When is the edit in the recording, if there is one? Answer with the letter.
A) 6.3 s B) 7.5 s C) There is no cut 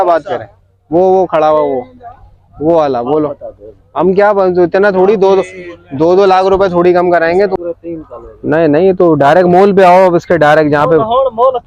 B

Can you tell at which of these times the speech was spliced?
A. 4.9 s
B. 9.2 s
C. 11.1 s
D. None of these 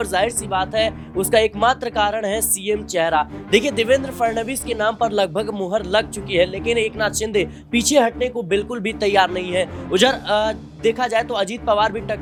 D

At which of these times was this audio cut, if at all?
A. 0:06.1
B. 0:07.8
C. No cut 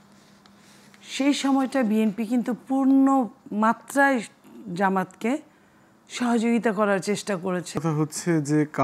B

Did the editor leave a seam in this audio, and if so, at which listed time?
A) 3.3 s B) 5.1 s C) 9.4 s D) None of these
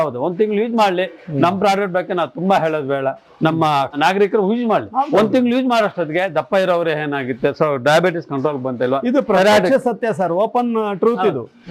D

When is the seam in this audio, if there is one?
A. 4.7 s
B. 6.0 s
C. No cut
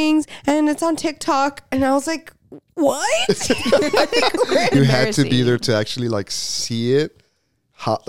A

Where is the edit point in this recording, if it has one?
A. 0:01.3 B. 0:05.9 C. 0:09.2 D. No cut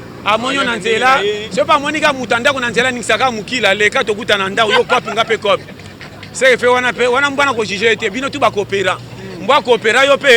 D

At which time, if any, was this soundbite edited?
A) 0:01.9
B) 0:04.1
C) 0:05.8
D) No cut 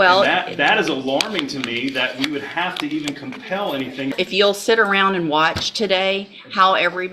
B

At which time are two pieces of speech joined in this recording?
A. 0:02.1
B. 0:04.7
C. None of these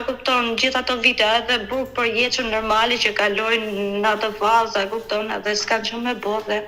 C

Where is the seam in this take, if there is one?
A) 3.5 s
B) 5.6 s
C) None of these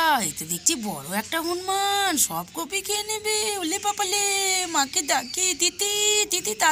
C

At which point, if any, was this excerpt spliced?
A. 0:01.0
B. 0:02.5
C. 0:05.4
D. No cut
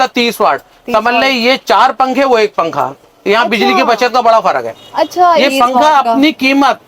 C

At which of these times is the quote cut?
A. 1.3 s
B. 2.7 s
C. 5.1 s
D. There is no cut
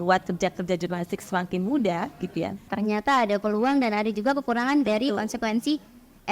B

